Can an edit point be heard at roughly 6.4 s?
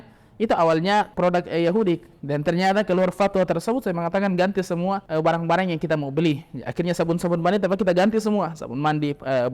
no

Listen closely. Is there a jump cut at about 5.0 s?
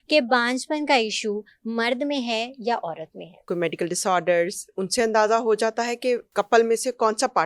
no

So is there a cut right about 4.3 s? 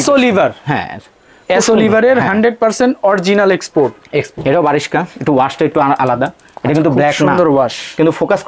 yes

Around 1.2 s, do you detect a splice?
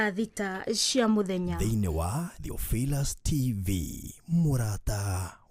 no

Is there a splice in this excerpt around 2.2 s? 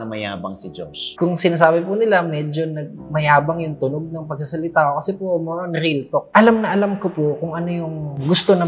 no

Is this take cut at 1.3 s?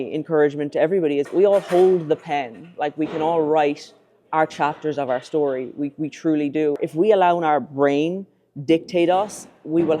yes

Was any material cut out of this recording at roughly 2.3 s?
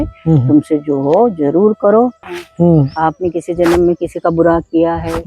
yes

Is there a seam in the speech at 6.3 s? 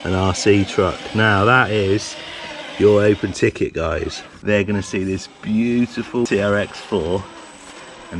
yes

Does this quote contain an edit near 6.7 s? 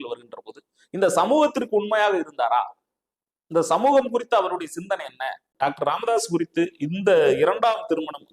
no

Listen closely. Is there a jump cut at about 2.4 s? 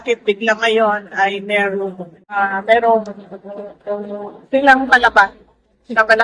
yes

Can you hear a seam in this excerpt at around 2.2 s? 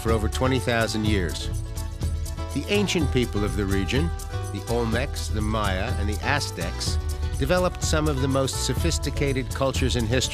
no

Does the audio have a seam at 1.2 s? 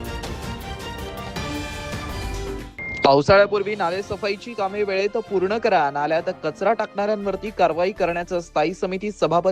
no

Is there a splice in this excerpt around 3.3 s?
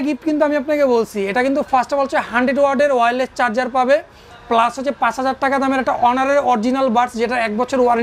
no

